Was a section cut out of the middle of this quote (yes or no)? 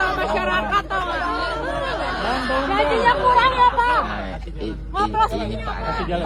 no